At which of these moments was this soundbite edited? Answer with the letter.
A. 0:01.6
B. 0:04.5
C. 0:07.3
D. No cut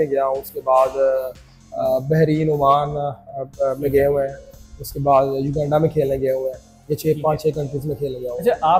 D